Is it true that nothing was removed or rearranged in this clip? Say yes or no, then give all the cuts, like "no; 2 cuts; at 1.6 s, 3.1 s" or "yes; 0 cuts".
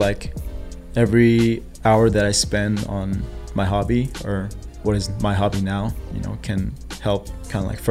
yes; 0 cuts